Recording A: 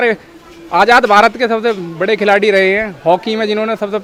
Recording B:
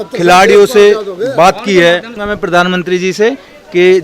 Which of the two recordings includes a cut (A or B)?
B